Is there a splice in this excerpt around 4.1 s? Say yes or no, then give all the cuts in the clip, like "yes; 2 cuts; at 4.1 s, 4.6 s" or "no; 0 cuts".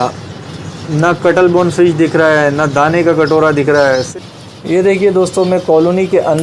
yes; 1 cut; at 4.1 s